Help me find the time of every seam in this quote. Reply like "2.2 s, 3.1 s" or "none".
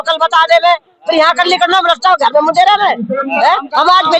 none